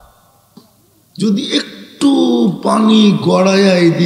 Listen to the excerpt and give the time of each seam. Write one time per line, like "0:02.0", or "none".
none